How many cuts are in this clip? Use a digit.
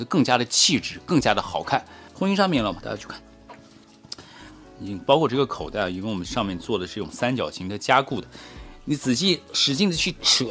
1